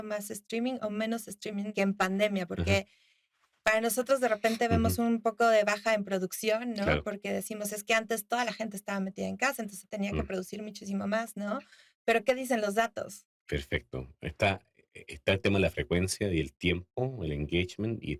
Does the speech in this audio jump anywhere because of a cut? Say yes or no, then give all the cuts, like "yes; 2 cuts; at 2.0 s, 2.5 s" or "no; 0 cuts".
no; 0 cuts